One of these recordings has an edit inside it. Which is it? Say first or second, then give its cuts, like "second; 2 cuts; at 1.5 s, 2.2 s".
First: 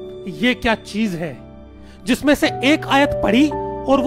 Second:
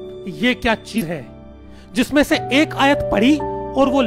second; 1 cut; at 1.0 s